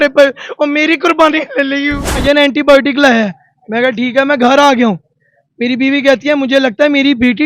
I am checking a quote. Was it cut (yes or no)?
yes